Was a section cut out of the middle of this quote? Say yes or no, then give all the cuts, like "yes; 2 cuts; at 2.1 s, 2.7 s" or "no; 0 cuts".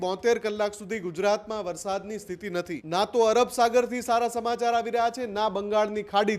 yes; 1 cut; at 2.8 s